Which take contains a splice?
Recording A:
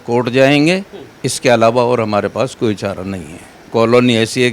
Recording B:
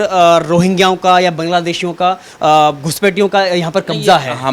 A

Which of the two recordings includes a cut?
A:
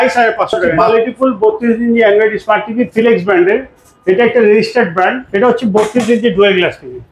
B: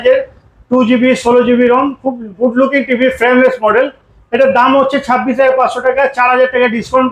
A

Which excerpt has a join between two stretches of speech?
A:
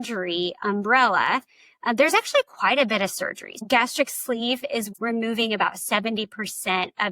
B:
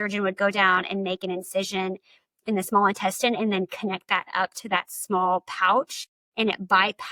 A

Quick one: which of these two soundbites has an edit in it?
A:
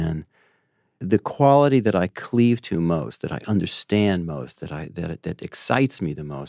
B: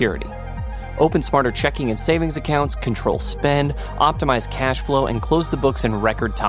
A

